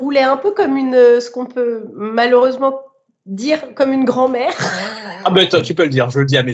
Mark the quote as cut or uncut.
uncut